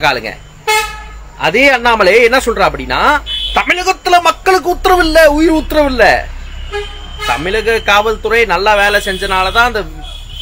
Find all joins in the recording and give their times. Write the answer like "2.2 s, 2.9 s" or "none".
none